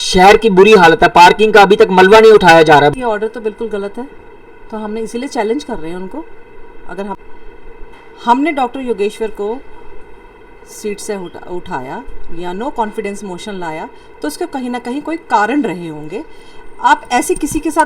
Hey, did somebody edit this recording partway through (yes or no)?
yes